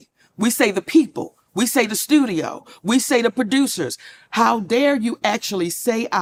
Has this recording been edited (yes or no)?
no